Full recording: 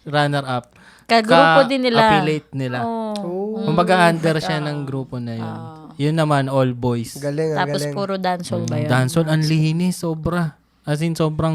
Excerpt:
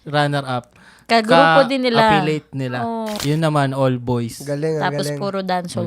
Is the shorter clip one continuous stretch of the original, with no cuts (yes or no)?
no